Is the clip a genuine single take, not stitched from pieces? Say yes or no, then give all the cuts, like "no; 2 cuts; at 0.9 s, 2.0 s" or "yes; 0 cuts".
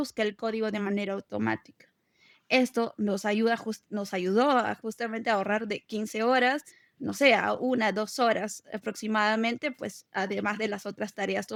yes; 0 cuts